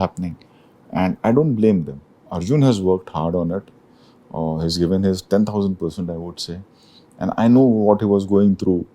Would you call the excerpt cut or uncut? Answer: cut